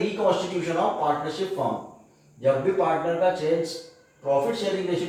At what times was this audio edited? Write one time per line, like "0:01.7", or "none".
none